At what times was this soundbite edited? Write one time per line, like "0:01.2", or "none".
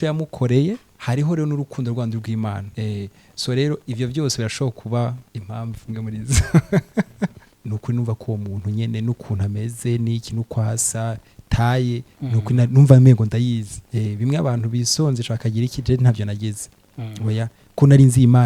0:00.9
0:02.7
0:05.3
0:07.5
0:13.8